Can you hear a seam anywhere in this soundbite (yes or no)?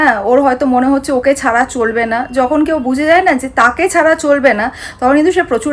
no